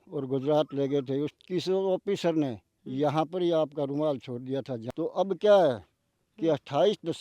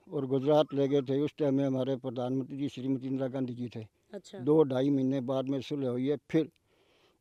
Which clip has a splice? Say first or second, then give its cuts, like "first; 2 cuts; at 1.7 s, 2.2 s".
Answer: first; 2 cuts; at 1.3 s, 4.8 s